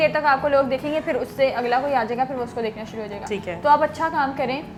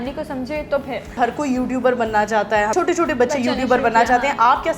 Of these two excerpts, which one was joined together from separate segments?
second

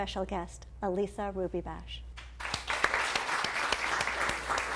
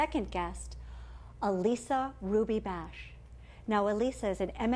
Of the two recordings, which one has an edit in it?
second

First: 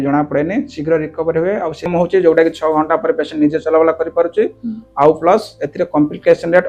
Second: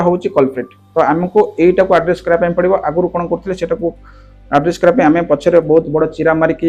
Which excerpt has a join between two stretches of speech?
first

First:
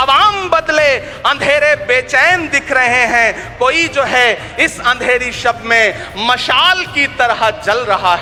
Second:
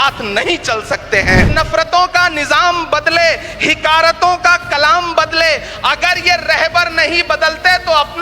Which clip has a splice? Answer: second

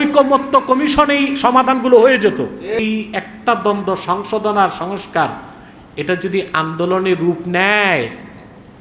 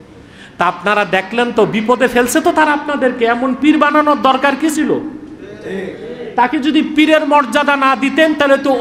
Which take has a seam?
first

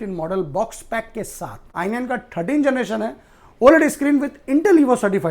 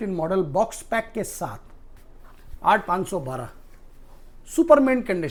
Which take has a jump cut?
first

